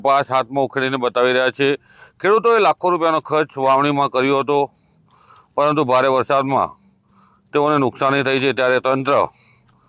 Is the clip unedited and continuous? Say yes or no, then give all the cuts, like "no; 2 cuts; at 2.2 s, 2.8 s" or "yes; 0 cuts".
yes; 0 cuts